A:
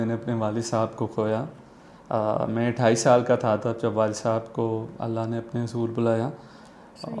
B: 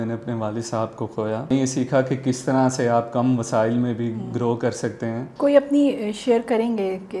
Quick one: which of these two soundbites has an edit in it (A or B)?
B